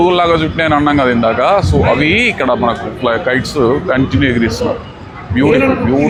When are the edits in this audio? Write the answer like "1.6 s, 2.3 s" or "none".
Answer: none